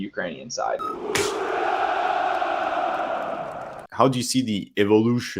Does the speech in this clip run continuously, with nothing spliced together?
no; 2 cuts; at 0.8 s, 3.8 s

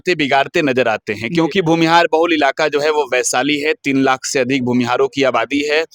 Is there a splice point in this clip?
no; 0 cuts

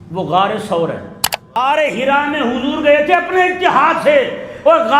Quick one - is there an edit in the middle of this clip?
yes; 1 cut; at 1.6 s

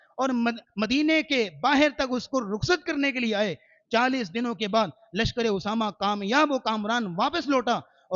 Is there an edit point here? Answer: no; 0 cuts

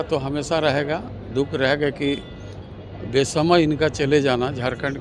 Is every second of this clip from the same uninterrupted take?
yes; 0 cuts

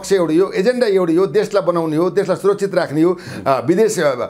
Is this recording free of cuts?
yes; 0 cuts

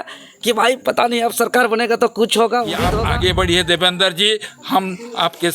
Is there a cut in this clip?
yes; 1 cut; at 2.9 s

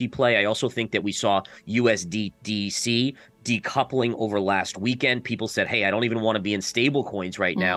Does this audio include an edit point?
no; 0 cuts

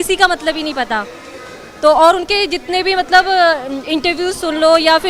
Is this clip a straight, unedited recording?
yes; 0 cuts

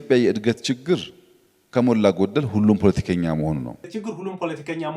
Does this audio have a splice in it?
yes; 1 cut; at 3.9 s

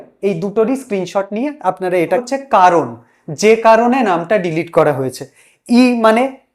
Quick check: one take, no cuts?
no; 1 cut; at 2.1 s

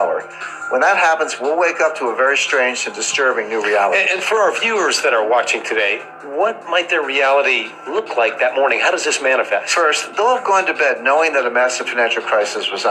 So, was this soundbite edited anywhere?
yes; 1 cut; at 10.0 s

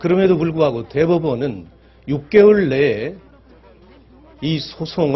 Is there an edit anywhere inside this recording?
yes; 1 cut; at 1.4 s

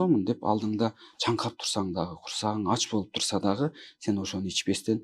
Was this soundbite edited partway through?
no; 0 cuts

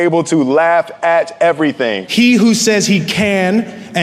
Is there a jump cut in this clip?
yes; 1 cut; at 2.0 s

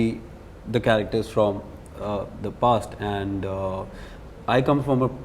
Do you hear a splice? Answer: no; 0 cuts

